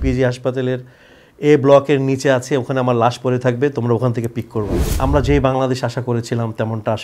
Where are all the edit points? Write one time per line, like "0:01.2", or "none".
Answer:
0:04.9